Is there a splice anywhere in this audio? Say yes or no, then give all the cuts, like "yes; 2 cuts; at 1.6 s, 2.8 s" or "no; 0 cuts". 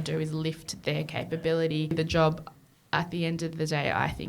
yes; 1 cut; at 1.9 s